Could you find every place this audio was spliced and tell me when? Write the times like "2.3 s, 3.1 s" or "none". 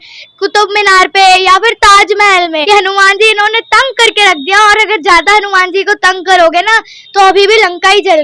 2.6 s